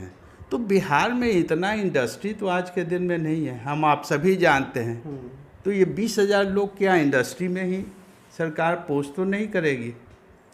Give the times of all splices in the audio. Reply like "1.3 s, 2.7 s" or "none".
none